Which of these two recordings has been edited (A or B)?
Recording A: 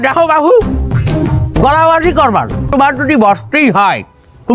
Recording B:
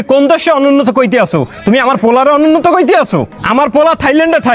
A